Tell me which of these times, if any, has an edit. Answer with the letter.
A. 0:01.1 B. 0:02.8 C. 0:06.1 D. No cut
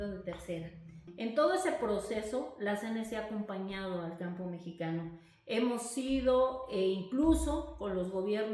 A